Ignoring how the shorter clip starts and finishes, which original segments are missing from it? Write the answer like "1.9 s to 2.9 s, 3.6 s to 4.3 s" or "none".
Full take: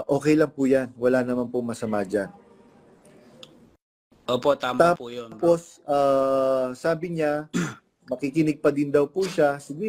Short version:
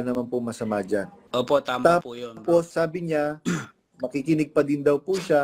2.4 s to 4.1 s, 5.6 s to 6.8 s